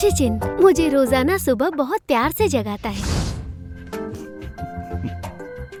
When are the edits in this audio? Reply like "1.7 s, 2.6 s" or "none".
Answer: none